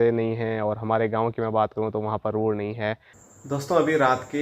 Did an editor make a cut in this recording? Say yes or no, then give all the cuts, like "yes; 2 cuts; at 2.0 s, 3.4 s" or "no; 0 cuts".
yes; 1 cut; at 3.1 s